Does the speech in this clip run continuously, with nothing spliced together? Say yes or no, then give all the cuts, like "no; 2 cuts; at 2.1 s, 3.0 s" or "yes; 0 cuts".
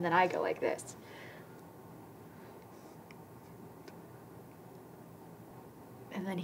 yes; 0 cuts